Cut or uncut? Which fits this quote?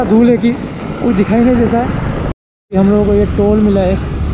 cut